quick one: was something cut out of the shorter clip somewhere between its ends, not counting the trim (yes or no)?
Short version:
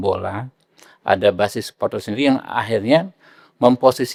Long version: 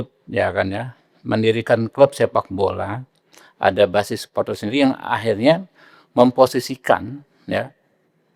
no